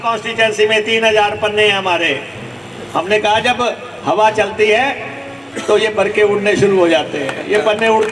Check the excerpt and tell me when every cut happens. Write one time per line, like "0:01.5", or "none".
none